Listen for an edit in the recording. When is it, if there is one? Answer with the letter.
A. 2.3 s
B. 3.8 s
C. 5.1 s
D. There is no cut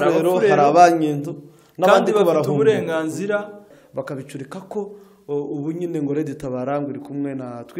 B